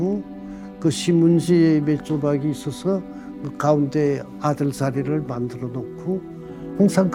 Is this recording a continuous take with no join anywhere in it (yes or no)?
yes